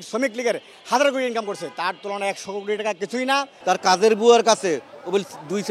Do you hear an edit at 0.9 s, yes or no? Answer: no